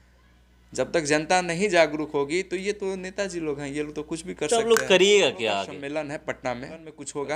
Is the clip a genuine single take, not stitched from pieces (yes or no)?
yes